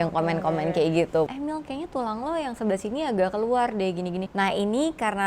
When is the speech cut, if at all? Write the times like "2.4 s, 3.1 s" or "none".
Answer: 1.3 s, 4.3 s